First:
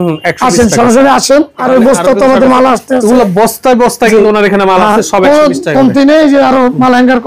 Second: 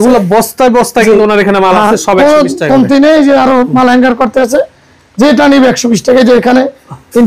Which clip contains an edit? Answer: first; 1 cut; at 1.6 s

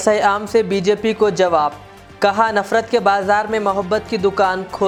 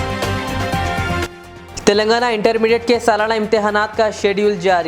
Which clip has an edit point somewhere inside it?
second; 1 cut; at 1.2 s

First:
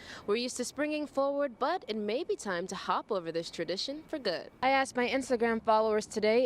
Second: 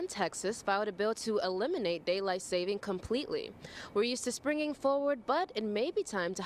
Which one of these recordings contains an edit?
first; 1 cut; at 4.5 s

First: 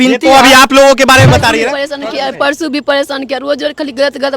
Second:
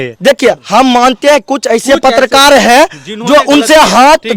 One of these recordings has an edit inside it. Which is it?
first; 1 cut; at 1.8 s

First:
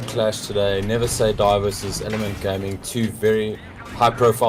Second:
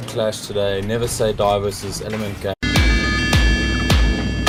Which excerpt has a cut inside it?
first; 1 cut; at 2.6 s

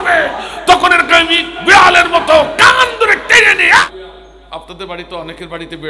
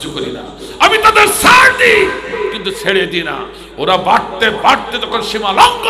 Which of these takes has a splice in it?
first; 1 cut; at 3.8 s

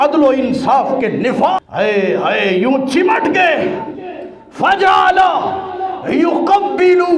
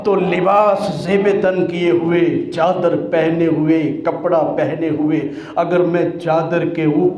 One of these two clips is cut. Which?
first; 1 cut; at 1.6 s

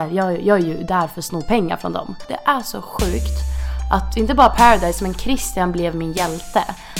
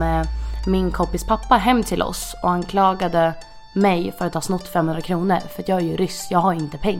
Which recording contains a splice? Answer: first; 1 cut; at 2.3 s

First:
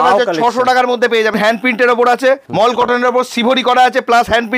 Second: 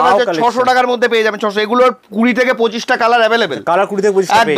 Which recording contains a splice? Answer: first; 2 cuts; at 1.3 s, 2.5 s

